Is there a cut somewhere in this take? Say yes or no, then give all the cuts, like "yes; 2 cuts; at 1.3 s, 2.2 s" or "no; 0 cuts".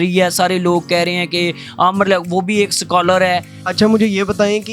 yes; 1 cut; at 3.6 s